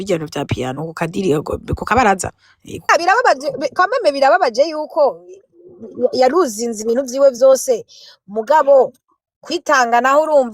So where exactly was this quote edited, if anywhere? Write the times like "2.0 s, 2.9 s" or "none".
2.9 s